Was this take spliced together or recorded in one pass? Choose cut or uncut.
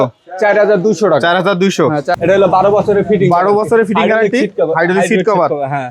cut